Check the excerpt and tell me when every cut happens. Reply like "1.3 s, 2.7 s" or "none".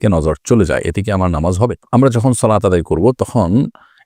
none